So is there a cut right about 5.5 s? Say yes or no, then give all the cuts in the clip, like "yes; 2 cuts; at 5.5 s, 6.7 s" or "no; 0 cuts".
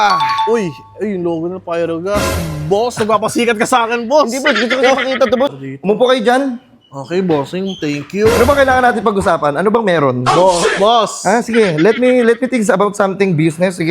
yes; 1 cut; at 5.5 s